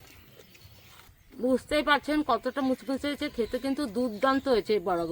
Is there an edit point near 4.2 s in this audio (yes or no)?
no